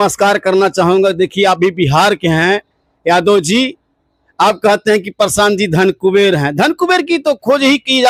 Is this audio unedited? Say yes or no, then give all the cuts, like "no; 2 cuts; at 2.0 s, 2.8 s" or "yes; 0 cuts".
yes; 0 cuts